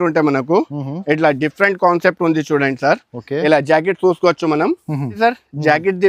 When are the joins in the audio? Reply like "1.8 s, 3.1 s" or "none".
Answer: 5.1 s